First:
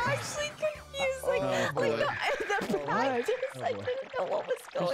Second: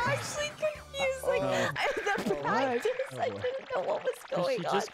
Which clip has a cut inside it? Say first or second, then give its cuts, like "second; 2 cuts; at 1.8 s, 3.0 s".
second; 1 cut; at 1.7 s